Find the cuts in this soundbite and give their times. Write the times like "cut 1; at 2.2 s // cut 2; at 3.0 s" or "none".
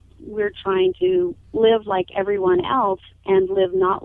cut 1; at 1.4 s

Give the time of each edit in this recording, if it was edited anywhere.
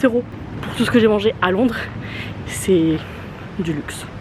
none

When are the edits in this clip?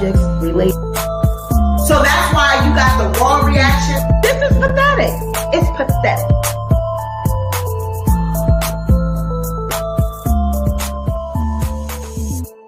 none

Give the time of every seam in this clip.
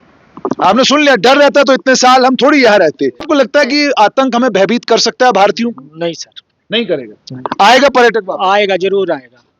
cut 1; at 3.2 s

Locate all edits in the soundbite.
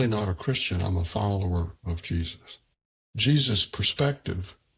cut 1; at 3.1 s

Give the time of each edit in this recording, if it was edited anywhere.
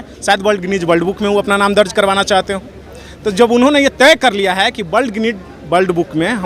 none

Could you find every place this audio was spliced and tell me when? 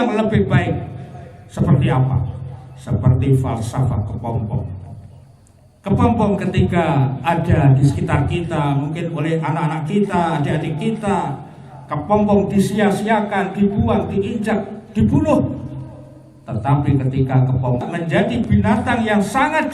cut 1; at 17.8 s

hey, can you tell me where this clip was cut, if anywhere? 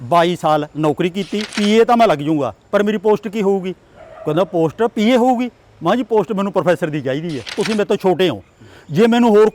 cut 1; at 1.5 s // cut 2; at 7.6 s

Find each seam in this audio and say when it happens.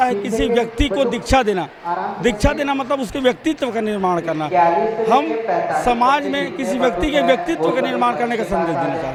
none

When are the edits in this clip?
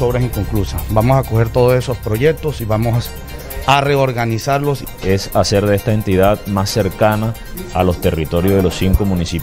cut 1; at 4.9 s

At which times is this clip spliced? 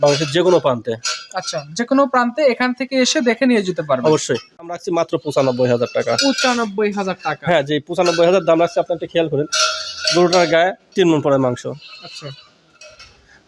cut 1; at 4.8 s

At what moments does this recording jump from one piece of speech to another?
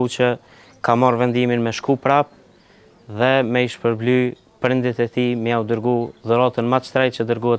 none

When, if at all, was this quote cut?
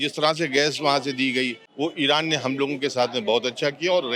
cut 1; at 1.6 s

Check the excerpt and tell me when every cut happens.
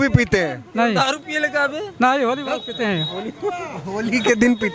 none

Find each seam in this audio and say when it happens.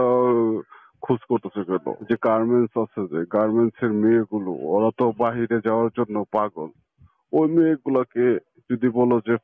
cut 1; at 2.0 s

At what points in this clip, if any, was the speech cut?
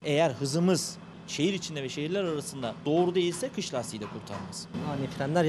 cut 1; at 1.2 s // cut 2; at 4.7 s

